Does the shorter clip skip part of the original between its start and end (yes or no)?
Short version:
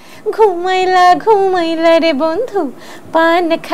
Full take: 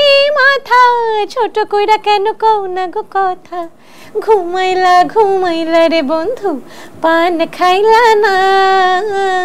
no